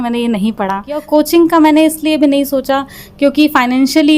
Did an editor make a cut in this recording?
yes; 1 cut; at 1.0 s

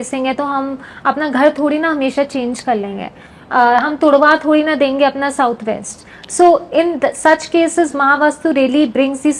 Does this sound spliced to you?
no; 0 cuts

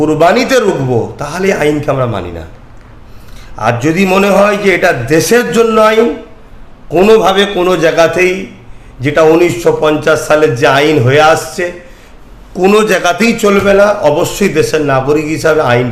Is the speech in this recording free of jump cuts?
yes; 0 cuts

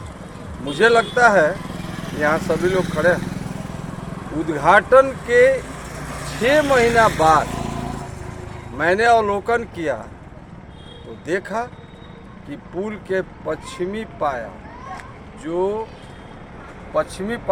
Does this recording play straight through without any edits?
yes; 0 cuts

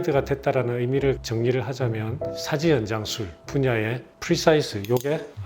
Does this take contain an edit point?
yes; 1 cut; at 1.2 s

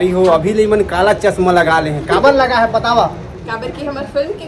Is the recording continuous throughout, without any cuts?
yes; 0 cuts

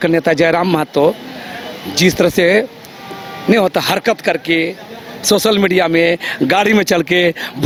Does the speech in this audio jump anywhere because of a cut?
no; 0 cuts

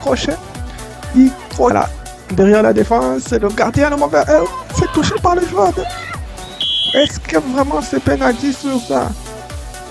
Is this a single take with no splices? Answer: no; 1 cut; at 1.7 s

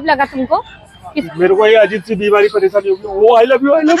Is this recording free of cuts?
no; 1 cut; at 1.2 s

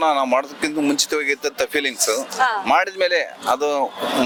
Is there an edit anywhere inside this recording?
no; 0 cuts

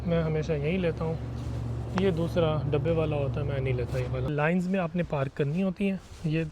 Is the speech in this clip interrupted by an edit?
yes; 1 cut; at 4.3 s

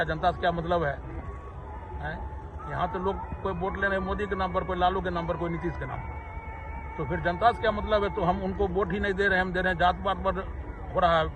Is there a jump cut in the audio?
no; 0 cuts

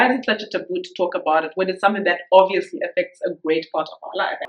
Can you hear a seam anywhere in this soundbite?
no; 0 cuts

